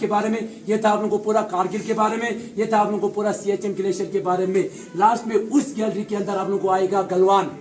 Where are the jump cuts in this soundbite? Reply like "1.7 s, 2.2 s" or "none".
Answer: none